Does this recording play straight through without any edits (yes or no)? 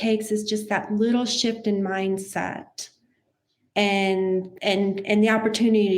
no